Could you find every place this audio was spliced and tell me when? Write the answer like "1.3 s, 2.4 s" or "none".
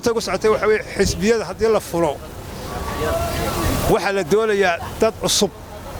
none

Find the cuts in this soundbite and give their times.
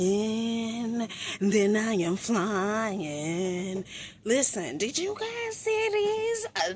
none

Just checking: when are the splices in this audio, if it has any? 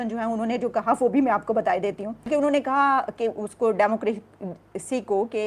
2.3 s

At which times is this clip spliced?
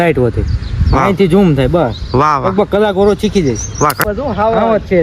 4.1 s

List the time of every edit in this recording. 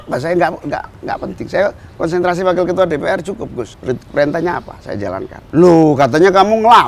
3.7 s, 5.3 s

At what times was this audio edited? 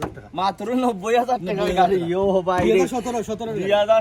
none

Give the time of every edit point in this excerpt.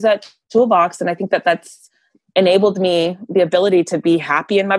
none

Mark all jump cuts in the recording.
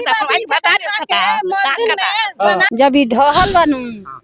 2.7 s

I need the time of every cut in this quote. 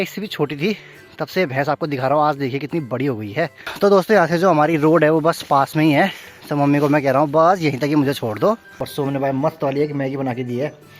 3.6 s, 8.8 s

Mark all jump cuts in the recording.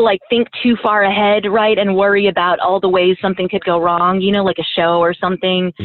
none

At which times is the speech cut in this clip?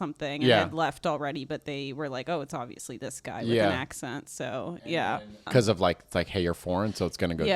5.0 s

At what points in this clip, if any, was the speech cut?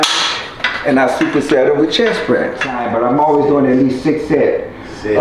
2.8 s

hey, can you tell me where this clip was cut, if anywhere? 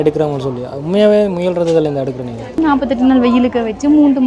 2.6 s

